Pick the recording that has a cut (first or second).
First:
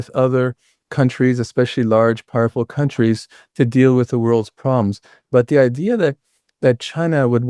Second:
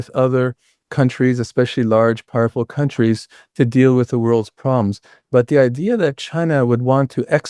second